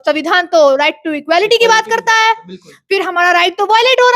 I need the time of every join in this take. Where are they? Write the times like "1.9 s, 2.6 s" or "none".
none